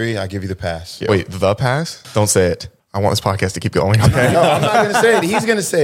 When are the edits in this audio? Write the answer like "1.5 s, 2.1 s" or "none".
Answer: 1.0 s, 2.0 s